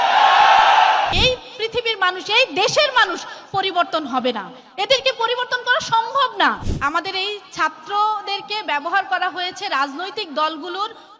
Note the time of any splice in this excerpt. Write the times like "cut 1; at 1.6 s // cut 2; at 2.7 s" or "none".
cut 1; at 1.2 s // cut 2; at 6.7 s